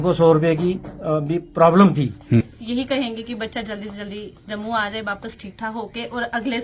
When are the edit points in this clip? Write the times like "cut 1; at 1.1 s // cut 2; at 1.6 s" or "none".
cut 1; at 2.6 s

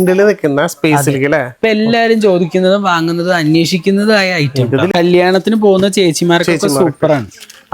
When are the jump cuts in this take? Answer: cut 1; at 4.9 s

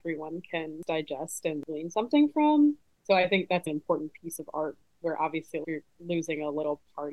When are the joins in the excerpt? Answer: cut 1; at 0.8 s // cut 2; at 1.6 s

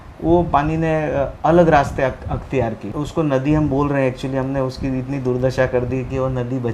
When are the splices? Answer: cut 1; at 2.9 s

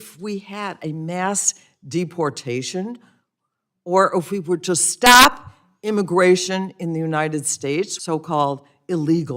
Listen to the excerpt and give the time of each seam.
cut 1; at 8.0 s

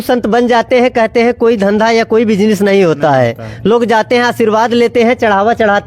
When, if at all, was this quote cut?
none

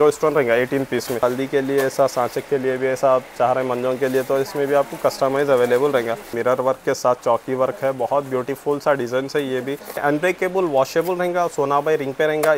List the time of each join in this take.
cut 1; at 1.2 s // cut 2; at 6.3 s // cut 3; at 10.0 s

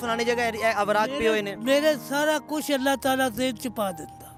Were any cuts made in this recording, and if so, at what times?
none

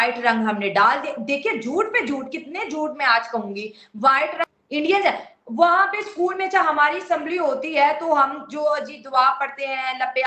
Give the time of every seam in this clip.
cut 1; at 4.5 s

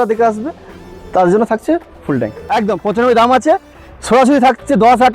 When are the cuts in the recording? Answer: cut 1; at 2.4 s

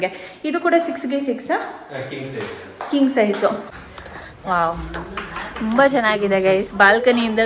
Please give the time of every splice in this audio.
cut 1; at 3.6 s

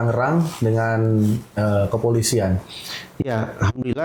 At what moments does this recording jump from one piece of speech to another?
none

